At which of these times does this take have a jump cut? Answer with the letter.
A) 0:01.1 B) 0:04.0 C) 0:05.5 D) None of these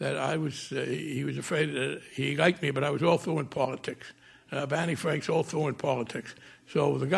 D